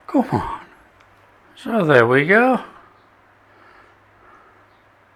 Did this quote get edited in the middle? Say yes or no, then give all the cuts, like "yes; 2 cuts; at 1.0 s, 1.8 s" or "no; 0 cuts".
no; 0 cuts